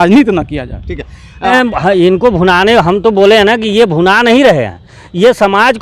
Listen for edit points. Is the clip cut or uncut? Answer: cut